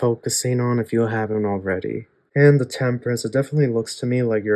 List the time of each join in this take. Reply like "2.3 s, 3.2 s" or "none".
2.1 s